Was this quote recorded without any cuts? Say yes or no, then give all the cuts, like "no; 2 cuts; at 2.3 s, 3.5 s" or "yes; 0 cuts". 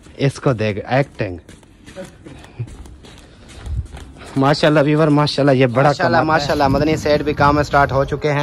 no; 1 cut; at 6.0 s